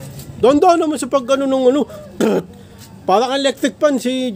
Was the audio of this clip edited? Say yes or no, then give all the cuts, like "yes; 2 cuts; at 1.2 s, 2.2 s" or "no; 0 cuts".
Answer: no; 0 cuts